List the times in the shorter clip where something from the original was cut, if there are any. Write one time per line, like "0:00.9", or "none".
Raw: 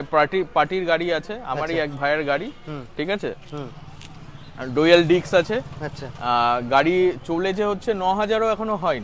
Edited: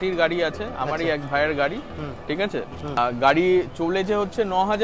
0:03.0